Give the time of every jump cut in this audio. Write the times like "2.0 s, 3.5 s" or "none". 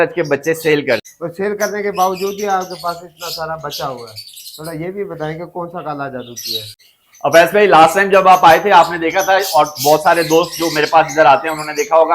1.0 s, 7.0 s